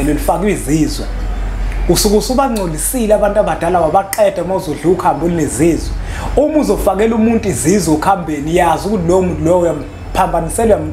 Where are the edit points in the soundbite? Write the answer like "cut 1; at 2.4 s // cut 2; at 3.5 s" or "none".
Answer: none